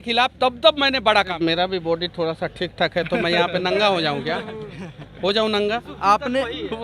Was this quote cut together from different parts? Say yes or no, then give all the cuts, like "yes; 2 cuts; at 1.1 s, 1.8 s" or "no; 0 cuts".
yes; 2 cuts; at 1.3 s, 5.8 s